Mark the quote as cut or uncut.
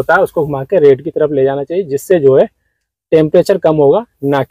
uncut